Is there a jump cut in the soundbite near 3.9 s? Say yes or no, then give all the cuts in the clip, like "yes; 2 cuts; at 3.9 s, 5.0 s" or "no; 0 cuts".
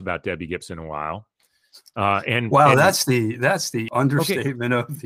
yes; 1 cut; at 3.9 s